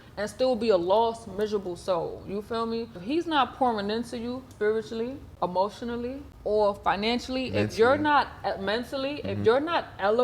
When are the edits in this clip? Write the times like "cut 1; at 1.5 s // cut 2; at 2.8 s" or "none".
cut 1; at 3.0 s // cut 2; at 4.5 s // cut 3; at 5.3 s // cut 4; at 6.3 s

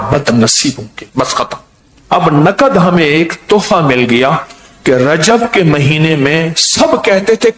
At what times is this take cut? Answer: cut 1; at 0.9 s // cut 2; at 2.2 s

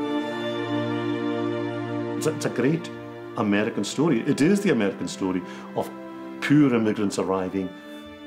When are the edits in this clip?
cut 1; at 2.2 s

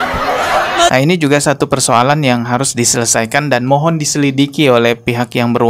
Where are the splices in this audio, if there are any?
cut 1; at 0.9 s

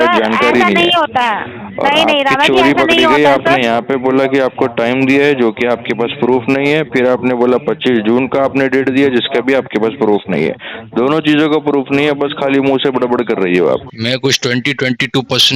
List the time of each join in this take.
cut 1; at 13.9 s

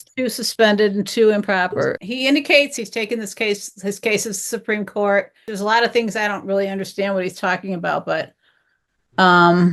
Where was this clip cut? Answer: cut 1; at 2.0 s // cut 2; at 2.7 s // cut 3; at 5.5 s

